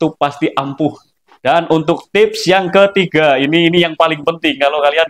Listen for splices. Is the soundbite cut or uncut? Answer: cut